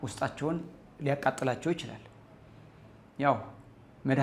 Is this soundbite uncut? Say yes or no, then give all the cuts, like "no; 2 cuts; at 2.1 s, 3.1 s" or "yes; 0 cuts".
yes; 0 cuts